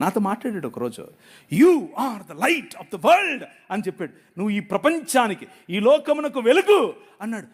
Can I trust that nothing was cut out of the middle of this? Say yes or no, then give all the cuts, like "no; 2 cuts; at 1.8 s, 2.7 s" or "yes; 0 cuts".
yes; 0 cuts